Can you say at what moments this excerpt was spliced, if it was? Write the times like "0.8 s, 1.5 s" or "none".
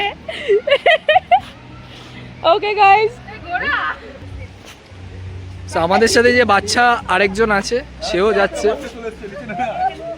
4.2 s